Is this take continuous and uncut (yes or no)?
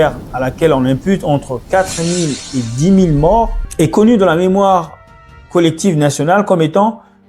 no